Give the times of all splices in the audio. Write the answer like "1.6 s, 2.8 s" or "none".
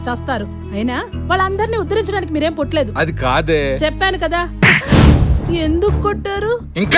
4.6 s